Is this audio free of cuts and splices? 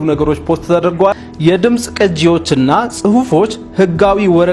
no; 1 cut; at 1.2 s

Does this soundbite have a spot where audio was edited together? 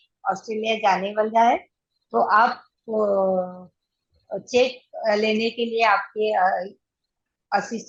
no; 0 cuts

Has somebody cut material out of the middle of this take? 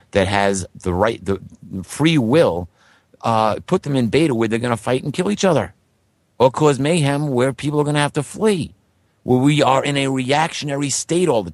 yes; 1 cut; at 4.1 s

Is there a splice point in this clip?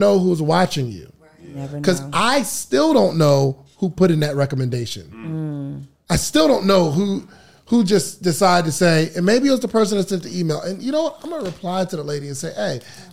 no; 0 cuts

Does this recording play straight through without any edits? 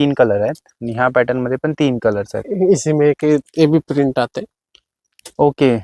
yes; 0 cuts

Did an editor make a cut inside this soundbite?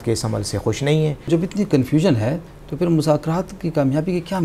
no; 0 cuts

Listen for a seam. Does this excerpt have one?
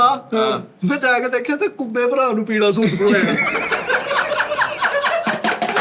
no; 0 cuts

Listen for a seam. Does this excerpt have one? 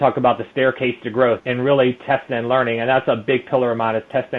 no; 0 cuts

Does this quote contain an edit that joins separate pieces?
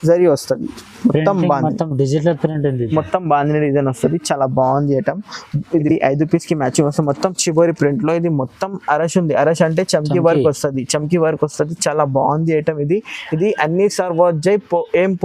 yes; 1 cut; at 5.9 s

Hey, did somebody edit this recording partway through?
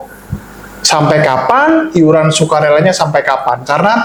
no; 0 cuts

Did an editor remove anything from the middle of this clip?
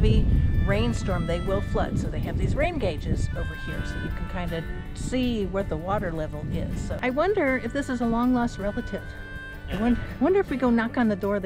yes; 1 cut; at 7.0 s

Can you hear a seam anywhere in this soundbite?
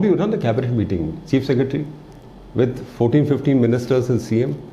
no; 0 cuts

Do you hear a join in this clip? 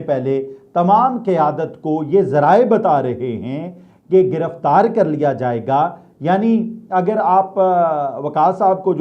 no; 0 cuts

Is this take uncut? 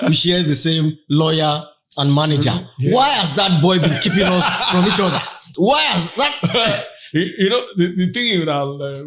yes; 0 cuts

